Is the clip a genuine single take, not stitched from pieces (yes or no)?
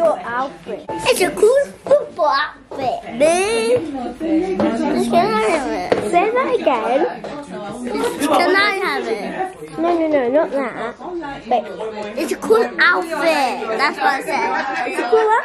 no